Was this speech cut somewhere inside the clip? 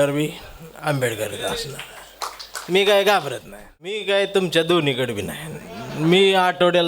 yes; 1 cut; at 4.0 s

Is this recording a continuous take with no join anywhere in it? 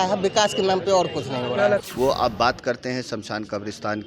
no; 1 cut; at 1.9 s

